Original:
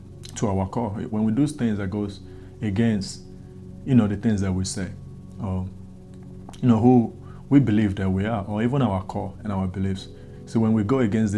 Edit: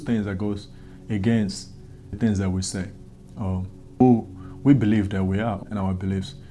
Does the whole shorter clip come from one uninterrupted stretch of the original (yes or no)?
no